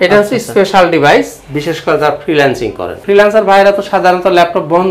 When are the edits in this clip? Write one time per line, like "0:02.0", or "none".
0:03.0